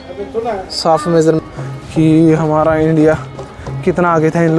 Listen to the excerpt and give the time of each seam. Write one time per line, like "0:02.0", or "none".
0:01.4